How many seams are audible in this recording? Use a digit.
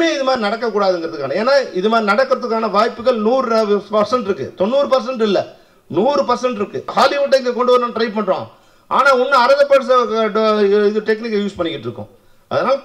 1